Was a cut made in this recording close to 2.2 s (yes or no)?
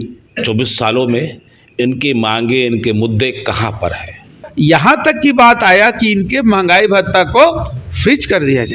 no